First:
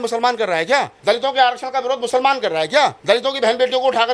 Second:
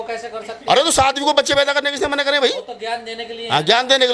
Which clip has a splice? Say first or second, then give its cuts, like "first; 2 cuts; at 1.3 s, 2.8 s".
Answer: first; 2 cuts; at 0.9 s, 3.0 s